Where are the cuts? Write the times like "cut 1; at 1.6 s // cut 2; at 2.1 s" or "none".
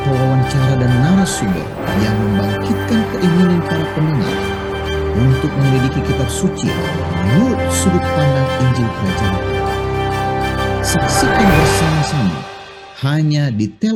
none

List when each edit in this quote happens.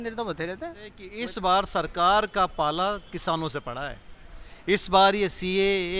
cut 1; at 1.0 s

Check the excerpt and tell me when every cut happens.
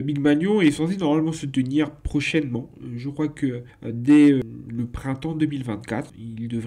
cut 1; at 4.4 s

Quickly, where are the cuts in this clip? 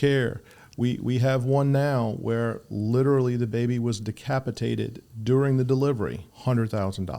cut 1; at 6.3 s

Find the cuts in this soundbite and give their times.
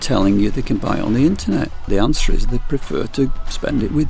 cut 1; at 1.8 s

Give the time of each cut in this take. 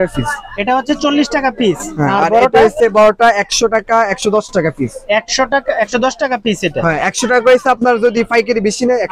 none

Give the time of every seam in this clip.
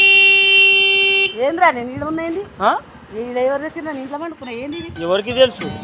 none

